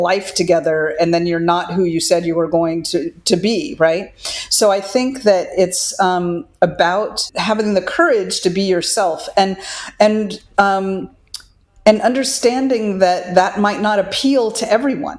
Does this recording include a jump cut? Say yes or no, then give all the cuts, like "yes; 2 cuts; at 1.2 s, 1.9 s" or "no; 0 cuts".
yes; 1 cut; at 7.3 s